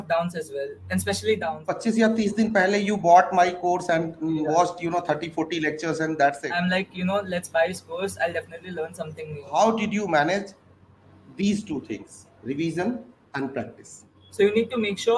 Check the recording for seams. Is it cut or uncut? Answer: cut